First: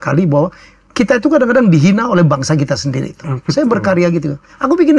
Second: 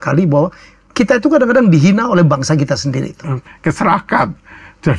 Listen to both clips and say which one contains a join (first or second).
second